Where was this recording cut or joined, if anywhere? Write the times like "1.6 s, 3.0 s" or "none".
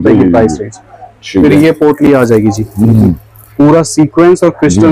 none